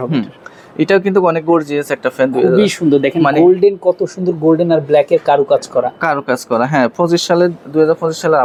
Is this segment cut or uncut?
uncut